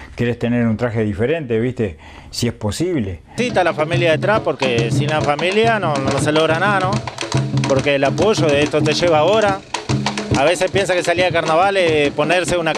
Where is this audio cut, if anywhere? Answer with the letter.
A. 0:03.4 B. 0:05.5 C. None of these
A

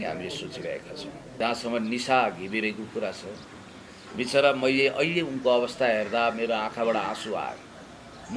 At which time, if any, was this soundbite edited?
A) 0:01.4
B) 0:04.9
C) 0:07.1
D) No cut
A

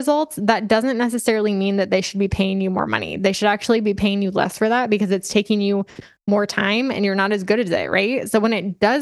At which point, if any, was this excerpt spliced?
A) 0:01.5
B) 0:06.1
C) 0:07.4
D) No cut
D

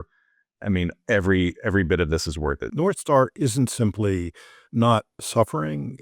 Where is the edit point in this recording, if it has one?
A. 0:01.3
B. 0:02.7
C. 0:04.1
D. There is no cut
B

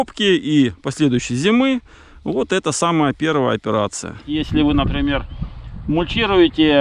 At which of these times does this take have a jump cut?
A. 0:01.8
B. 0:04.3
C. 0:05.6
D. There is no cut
B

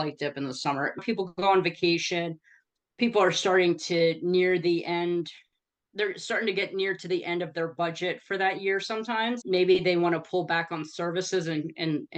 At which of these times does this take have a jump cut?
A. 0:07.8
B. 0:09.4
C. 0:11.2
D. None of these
B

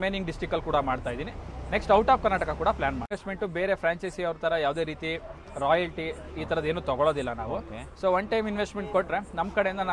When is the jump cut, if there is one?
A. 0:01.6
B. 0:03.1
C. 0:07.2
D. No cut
B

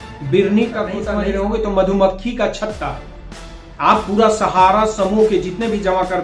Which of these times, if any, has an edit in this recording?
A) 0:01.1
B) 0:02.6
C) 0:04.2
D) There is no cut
A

